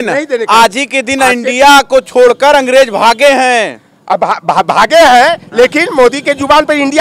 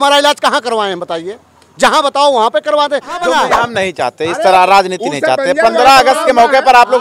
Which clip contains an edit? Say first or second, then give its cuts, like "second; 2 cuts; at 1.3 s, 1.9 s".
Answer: second; 1 cut; at 3.4 s